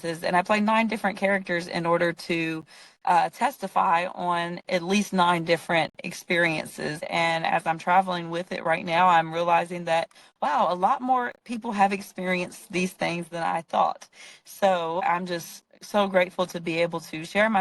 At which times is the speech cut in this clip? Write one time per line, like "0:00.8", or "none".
0:07.0
0:15.0